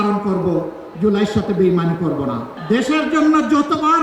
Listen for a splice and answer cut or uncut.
cut